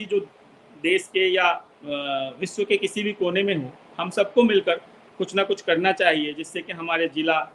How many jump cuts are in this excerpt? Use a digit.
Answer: 1